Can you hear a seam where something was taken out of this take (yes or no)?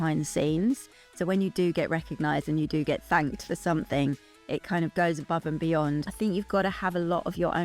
yes